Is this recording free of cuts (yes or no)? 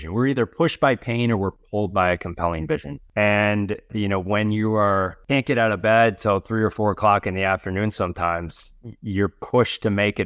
no